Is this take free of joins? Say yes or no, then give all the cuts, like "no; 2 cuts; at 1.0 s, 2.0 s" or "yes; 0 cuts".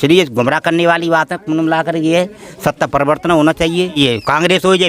no; 1 cut; at 4.0 s